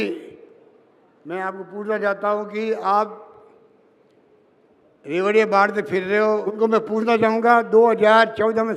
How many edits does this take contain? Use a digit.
1